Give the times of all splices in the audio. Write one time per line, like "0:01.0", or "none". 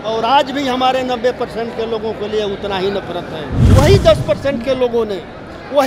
0:03.6